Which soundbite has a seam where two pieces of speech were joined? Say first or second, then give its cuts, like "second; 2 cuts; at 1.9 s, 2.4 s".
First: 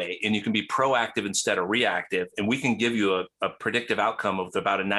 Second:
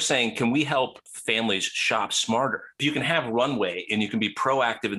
second; 2 cuts; at 1.1 s, 2.7 s